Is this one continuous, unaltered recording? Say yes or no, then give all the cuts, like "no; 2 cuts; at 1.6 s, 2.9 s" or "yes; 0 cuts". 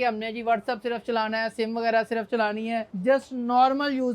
no; 1 cut; at 2.9 s